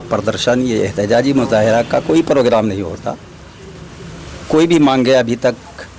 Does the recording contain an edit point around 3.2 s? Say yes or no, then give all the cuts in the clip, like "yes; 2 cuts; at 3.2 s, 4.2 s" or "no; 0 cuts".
no; 0 cuts